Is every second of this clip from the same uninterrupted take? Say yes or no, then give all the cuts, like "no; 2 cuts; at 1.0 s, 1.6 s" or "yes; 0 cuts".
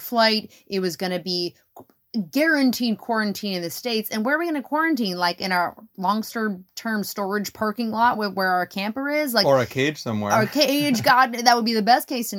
yes; 0 cuts